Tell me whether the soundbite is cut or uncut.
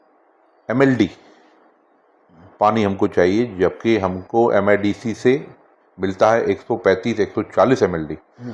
uncut